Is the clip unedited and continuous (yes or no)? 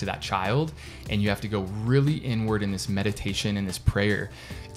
yes